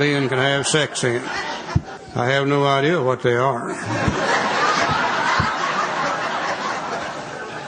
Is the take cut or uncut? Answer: cut